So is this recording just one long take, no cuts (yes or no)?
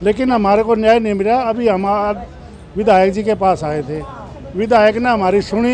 yes